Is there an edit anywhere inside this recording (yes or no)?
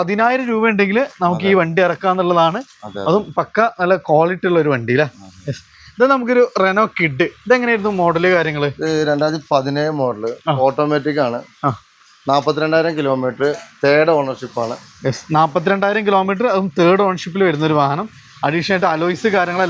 no